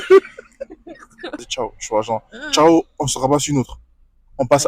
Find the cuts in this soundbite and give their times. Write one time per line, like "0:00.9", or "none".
0:01.5